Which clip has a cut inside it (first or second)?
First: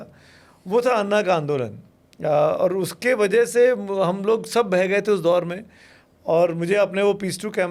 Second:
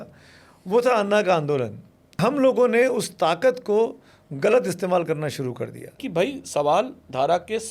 second